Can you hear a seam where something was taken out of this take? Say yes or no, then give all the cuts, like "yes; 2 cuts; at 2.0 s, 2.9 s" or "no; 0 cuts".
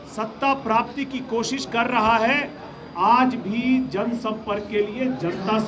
no; 0 cuts